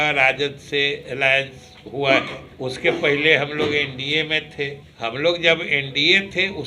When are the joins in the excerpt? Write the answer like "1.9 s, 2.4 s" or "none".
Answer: 2.4 s, 4.8 s

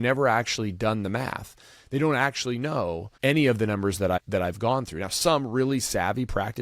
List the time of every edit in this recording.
3.1 s, 4.2 s

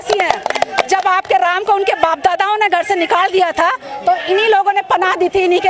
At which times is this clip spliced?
none

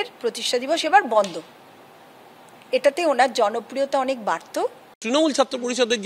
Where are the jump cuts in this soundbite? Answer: 4.9 s

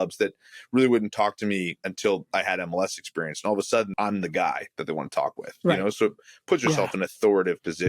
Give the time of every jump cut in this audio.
3.9 s

